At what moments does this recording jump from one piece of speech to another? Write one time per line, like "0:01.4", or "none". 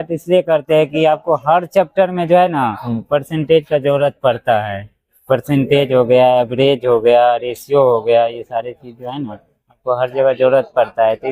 none